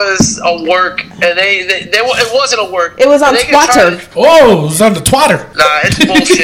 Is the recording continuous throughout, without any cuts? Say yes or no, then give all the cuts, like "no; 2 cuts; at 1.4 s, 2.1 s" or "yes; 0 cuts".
no; 2 cuts; at 4.0 s, 5.5 s